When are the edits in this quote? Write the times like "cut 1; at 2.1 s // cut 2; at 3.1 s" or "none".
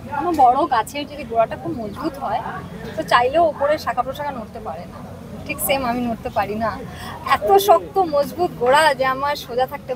none